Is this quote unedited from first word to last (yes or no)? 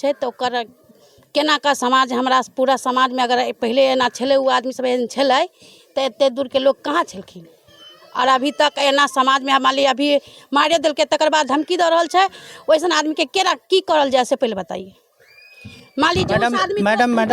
yes